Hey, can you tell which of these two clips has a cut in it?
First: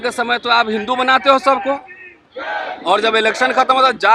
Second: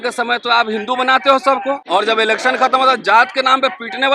second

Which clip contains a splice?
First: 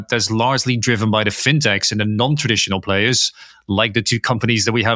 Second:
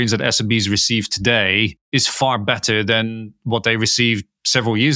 second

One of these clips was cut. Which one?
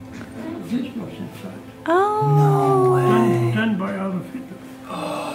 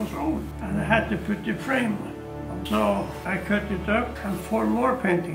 second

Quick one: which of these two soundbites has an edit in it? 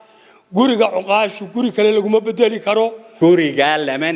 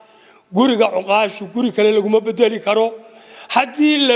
first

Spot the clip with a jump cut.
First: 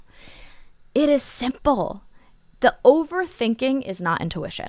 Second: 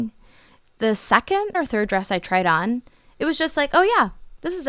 second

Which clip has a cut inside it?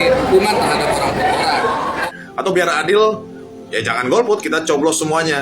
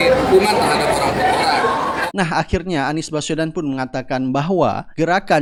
first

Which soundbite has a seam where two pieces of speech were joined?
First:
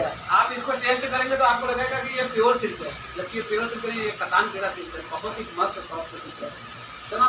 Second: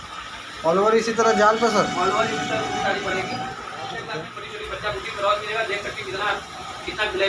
second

